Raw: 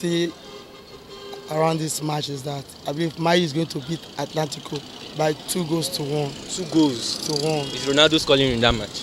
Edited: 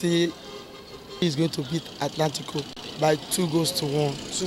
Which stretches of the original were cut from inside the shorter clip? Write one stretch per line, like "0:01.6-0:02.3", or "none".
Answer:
0:01.2-0:03.4